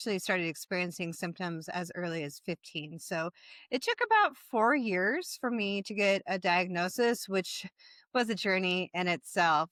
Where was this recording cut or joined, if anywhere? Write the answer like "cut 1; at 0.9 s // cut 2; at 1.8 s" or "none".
none